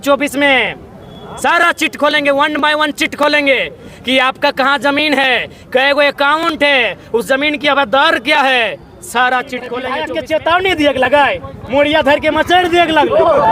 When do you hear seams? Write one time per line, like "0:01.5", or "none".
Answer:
0:09.8